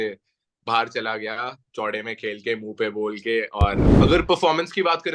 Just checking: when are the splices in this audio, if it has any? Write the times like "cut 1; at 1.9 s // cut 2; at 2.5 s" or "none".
cut 1; at 3.9 s